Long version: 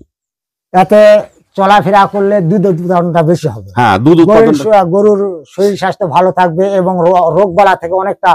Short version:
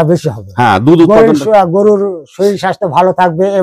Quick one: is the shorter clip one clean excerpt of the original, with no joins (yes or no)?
yes